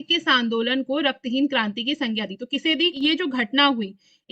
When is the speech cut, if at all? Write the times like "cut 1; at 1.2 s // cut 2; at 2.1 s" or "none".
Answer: cut 1; at 3.0 s